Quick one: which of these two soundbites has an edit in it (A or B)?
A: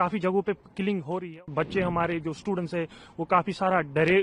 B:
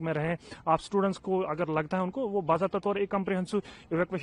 A